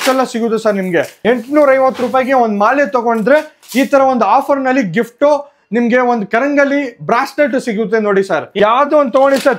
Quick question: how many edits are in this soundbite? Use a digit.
2